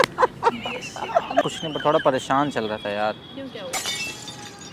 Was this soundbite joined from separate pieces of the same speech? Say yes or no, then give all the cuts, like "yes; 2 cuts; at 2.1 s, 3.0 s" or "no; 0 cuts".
yes; 1 cut; at 1.4 s